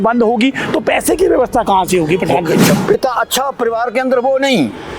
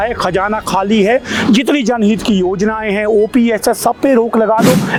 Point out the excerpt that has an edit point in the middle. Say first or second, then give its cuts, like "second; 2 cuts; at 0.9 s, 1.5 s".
first; 1 cut; at 2.8 s